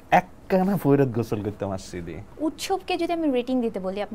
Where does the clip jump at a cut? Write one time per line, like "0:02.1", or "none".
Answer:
0:02.2